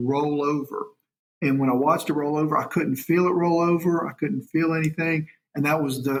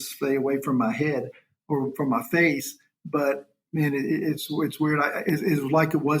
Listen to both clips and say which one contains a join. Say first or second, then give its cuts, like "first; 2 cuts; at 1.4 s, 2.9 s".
second; 1 cut; at 3.6 s